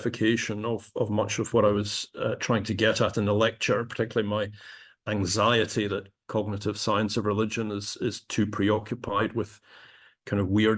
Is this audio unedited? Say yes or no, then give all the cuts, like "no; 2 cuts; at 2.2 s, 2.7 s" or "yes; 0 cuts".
yes; 0 cuts